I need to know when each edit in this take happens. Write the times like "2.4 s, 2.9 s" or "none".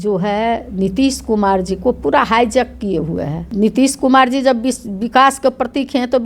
3.4 s